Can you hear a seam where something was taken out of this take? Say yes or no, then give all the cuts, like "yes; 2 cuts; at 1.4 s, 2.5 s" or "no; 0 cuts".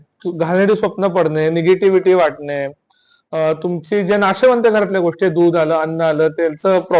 no; 0 cuts